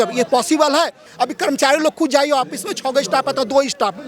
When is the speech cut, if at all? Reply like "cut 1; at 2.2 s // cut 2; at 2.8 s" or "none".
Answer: cut 1; at 1.0 s